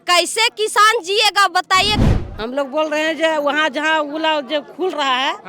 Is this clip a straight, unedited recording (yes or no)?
no